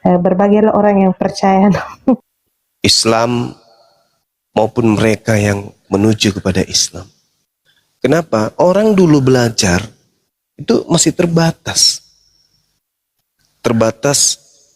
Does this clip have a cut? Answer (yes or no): yes